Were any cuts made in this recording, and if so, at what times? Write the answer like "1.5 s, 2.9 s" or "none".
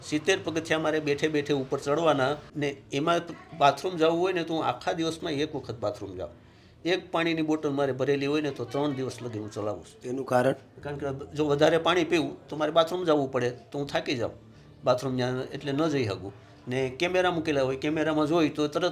2.5 s